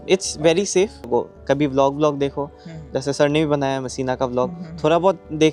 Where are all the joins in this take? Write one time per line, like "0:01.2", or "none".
0:01.1